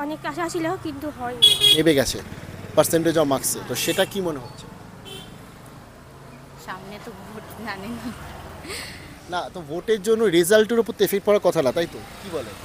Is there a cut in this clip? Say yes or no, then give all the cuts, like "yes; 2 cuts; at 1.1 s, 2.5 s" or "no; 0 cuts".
yes; 1 cut; at 1.8 s